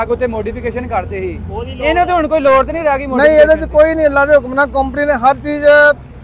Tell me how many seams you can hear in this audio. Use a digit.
0